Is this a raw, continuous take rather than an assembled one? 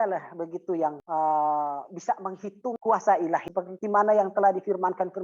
no; 3 cuts; at 1.0 s, 2.8 s, 3.5 s

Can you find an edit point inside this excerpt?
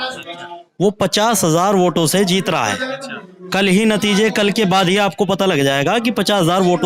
no; 0 cuts

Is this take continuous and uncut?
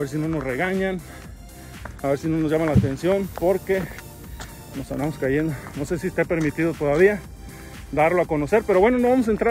yes; 0 cuts

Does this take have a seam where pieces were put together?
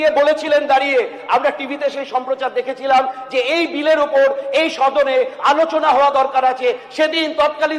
no; 0 cuts

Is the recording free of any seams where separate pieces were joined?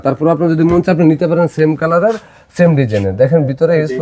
yes; 0 cuts

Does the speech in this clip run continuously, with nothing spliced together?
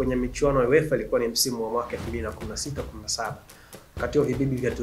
yes; 0 cuts

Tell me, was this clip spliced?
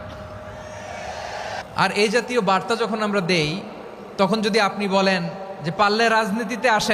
yes; 1 cut; at 1.6 s

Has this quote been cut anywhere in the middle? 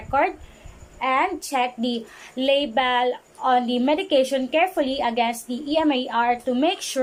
no; 0 cuts

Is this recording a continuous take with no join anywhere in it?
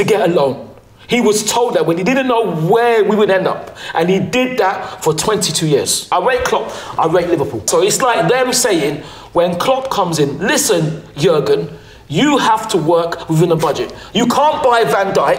no; 2 cuts; at 6.1 s, 7.7 s

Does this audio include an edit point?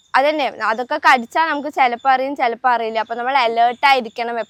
no; 0 cuts

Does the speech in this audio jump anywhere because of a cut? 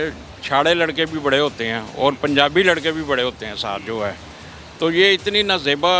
no; 0 cuts

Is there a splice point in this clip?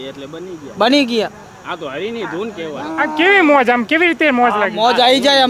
no; 0 cuts

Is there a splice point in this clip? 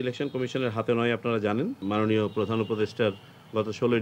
yes; 1 cut; at 1.8 s

